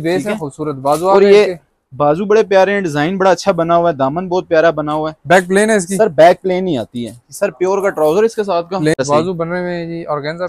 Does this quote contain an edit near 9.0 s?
yes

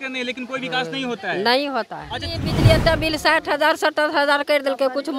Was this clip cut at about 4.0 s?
no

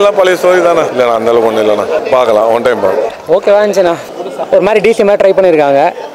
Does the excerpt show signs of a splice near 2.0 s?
yes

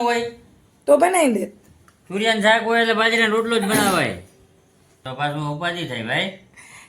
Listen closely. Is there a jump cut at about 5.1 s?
yes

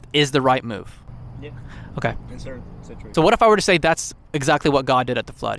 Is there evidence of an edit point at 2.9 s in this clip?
yes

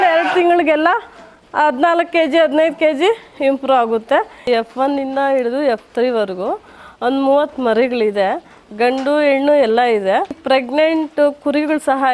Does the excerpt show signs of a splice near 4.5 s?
yes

